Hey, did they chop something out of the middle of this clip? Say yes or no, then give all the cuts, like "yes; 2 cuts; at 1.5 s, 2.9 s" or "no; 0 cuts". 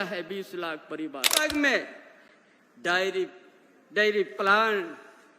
yes; 1 cut; at 1.4 s